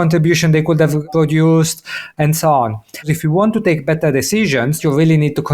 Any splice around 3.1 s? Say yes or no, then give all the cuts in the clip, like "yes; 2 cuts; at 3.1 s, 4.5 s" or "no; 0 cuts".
yes; 3 cuts; at 2.0 s, 3.1 s, 4.8 s